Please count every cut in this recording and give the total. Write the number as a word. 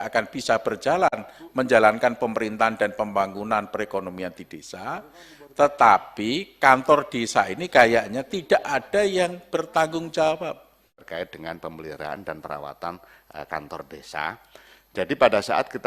one